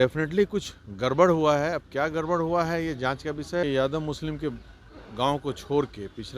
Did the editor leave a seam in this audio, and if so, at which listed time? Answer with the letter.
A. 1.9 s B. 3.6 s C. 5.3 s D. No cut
B